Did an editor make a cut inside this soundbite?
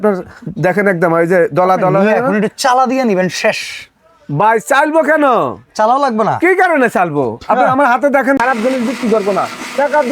yes; 1 cut; at 8.4 s

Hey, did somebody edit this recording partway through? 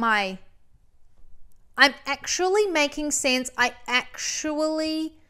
no; 0 cuts

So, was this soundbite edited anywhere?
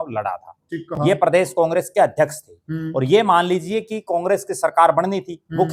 no; 0 cuts

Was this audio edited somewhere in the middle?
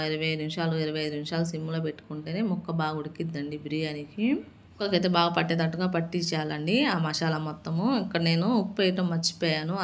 yes; 1 cut; at 4.9 s

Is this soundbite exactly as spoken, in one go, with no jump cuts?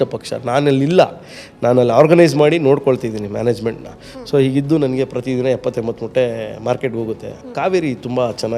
no; 1 cut; at 7.4 s

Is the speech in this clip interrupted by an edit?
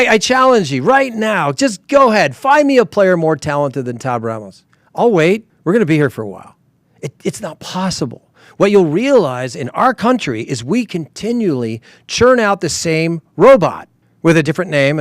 no; 0 cuts

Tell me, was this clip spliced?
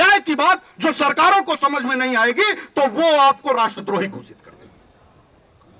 no; 0 cuts

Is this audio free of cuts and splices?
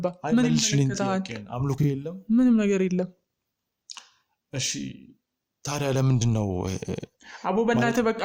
yes; 0 cuts

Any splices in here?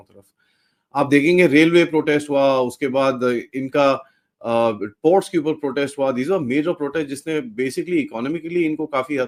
no; 0 cuts

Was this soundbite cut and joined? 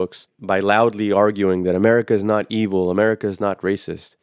no; 0 cuts

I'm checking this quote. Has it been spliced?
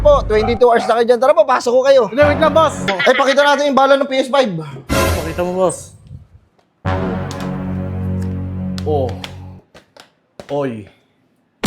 yes; 1 cut; at 2.9 s

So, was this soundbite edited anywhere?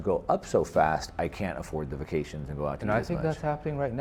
no; 0 cuts

